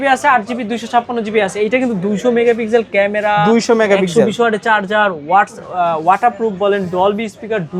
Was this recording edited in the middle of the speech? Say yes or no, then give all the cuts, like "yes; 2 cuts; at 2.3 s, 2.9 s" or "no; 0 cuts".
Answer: no; 0 cuts